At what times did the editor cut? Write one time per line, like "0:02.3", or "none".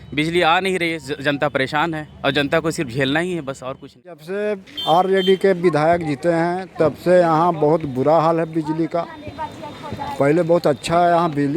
0:04.2